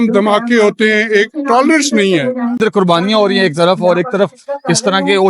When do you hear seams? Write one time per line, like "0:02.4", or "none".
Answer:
0:02.6